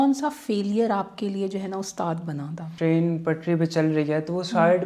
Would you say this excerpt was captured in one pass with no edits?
no; 1 cut; at 2.7 s

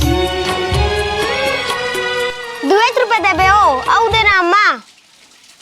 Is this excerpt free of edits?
no; 1 cut; at 2.5 s

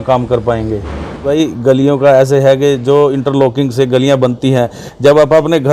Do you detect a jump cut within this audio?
yes; 1 cut; at 1.3 s

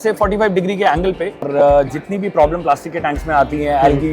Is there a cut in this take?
yes; 1 cut; at 1.5 s

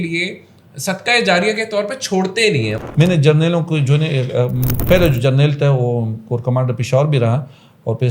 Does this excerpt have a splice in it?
yes; 2 cuts; at 2.8 s, 4.7 s

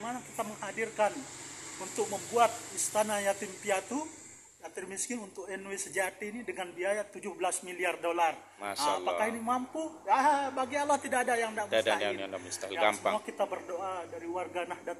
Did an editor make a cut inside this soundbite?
no; 0 cuts

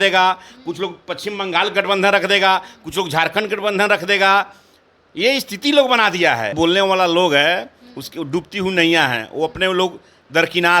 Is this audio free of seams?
no; 1 cut; at 6.5 s

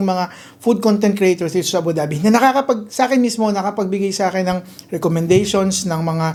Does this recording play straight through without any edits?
yes; 0 cuts

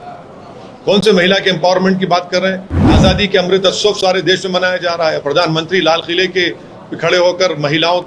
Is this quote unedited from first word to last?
no; 1 cut; at 2.8 s

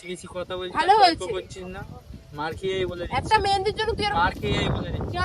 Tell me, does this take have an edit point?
no; 0 cuts

